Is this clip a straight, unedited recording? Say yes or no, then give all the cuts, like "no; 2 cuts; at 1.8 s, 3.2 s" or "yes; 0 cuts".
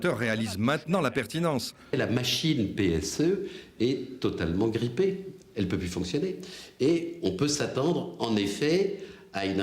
no; 1 cut; at 1.9 s